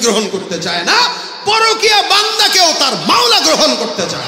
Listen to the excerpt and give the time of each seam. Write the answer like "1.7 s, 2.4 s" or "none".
none